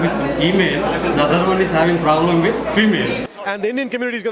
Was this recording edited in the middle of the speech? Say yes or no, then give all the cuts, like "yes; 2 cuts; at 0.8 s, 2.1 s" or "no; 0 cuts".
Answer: yes; 1 cut; at 3.2 s